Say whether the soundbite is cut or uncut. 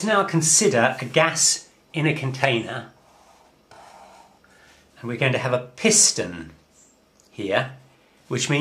cut